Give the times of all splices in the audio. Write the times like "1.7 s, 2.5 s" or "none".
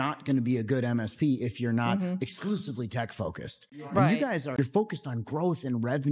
4.5 s